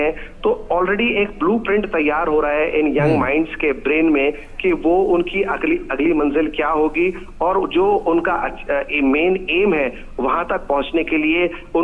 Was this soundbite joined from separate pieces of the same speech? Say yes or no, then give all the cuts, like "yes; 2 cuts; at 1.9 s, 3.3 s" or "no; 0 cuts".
no; 0 cuts